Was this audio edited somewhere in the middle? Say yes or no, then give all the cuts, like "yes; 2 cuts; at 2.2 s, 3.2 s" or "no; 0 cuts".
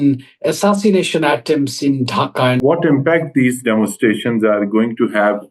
yes; 1 cut; at 2.6 s